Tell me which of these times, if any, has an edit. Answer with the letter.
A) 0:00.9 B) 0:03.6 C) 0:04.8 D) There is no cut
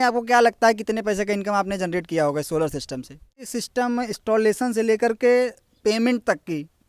B